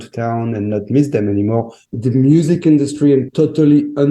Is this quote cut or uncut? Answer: cut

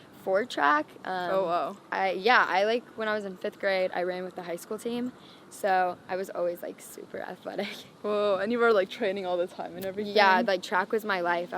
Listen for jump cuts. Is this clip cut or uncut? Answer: uncut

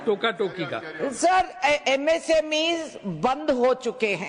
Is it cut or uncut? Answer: uncut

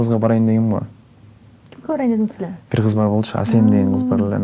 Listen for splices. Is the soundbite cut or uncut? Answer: uncut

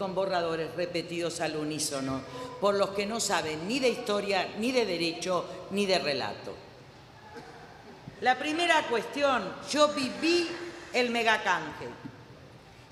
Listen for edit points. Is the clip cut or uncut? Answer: uncut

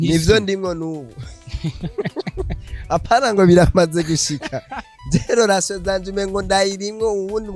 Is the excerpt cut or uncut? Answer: uncut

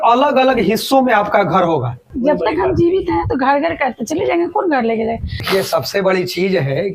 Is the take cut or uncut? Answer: cut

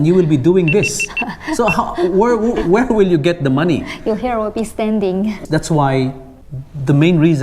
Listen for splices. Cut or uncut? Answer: cut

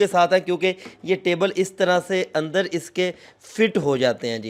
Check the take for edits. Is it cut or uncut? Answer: uncut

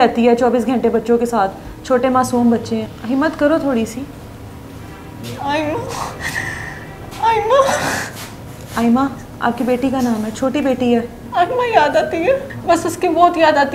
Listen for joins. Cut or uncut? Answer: cut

